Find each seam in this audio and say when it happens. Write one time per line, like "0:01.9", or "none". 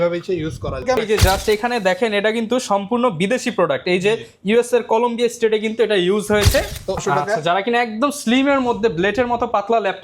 0:01.0
0:07.0